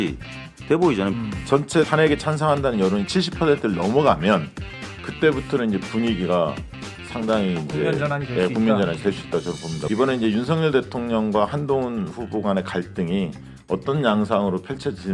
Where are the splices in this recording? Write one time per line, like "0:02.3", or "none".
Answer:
0:01.1
0:09.7